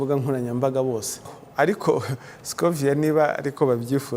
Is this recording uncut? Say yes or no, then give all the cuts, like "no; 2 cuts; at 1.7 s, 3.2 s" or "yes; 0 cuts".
no; 1 cut; at 1.4 s